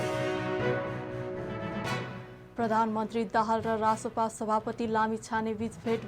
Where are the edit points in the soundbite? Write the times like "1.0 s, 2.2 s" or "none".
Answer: 1.0 s